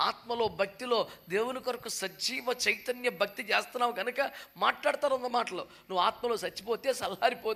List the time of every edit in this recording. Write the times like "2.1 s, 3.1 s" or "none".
none

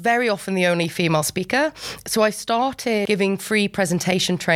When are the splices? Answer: 3.0 s

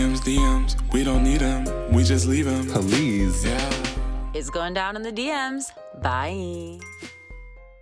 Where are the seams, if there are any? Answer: none

